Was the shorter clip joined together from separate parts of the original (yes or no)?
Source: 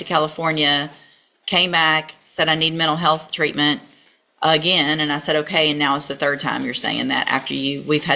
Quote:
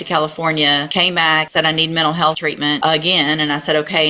yes